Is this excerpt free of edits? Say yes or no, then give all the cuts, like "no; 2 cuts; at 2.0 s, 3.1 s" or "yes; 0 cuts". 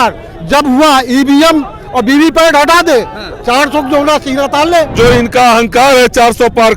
no; 1 cut; at 4.9 s